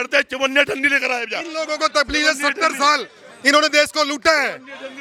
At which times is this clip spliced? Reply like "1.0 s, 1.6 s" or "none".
none

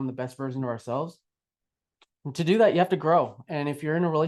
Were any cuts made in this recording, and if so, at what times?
none

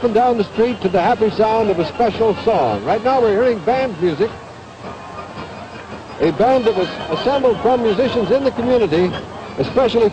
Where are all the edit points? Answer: none

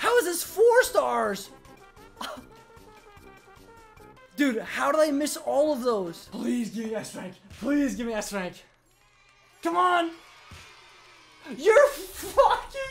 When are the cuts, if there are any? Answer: 1.8 s, 4.2 s, 6.2 s

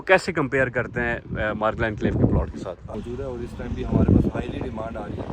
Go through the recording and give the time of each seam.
2.9 s

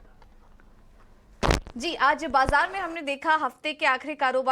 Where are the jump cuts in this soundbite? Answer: 1.1 s

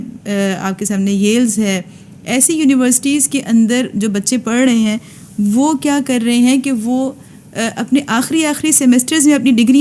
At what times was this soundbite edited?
none

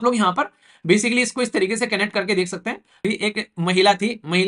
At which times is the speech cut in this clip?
3.0 s

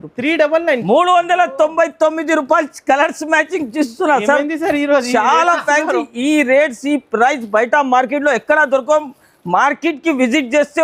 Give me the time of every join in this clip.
none

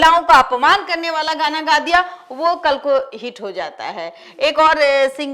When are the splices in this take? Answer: none

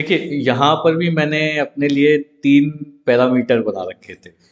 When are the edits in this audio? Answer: none

